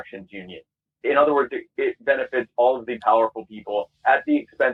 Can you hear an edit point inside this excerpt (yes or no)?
no